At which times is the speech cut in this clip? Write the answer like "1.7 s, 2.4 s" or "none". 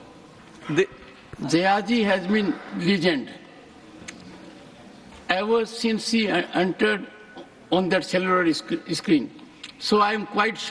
none